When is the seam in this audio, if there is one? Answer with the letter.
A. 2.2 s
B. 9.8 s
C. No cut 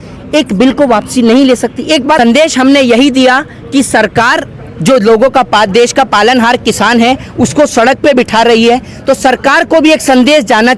A